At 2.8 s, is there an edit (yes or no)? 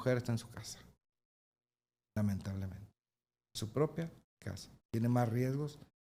no